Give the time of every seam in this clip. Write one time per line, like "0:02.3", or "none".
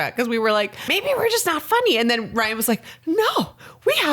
0:00.9